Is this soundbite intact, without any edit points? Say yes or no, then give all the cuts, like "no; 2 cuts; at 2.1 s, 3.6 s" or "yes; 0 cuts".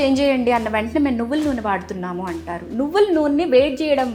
yes; 0 cuts